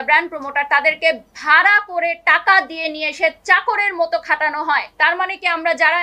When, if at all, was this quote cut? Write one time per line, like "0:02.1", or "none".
0:04.9